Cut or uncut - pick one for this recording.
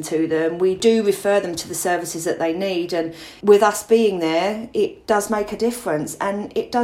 cut